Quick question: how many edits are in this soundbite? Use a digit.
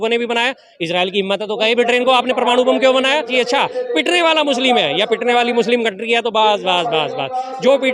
1